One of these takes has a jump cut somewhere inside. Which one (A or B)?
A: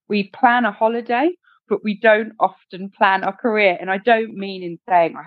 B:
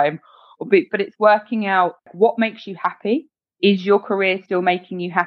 B